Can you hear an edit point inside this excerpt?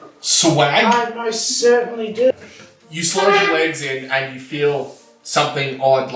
yes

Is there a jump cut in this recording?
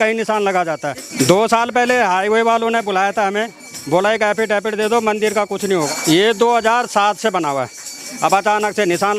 yes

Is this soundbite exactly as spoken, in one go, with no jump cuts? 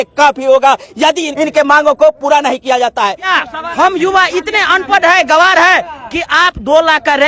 no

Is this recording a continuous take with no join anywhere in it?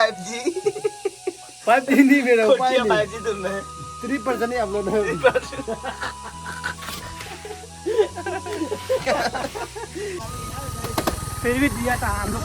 no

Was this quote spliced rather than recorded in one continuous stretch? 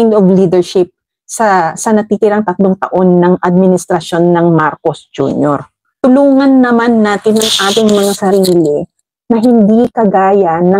yes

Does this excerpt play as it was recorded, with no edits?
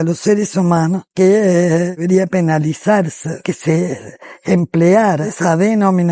no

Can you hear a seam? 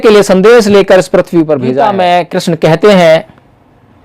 yes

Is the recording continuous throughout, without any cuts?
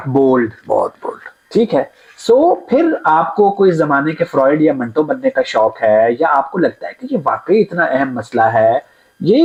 yes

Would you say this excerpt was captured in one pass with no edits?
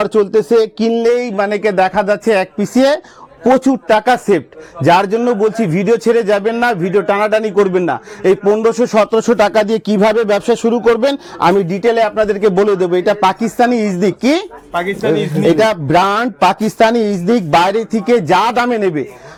yes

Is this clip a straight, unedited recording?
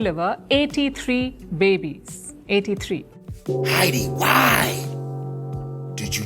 no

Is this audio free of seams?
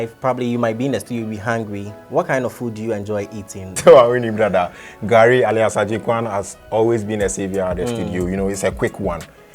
no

